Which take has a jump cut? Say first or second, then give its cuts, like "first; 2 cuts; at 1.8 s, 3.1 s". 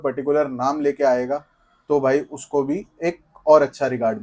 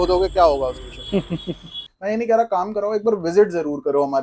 second; 1 cut; at 1.8 s